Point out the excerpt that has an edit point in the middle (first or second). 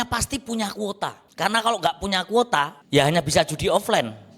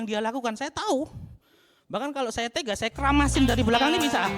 first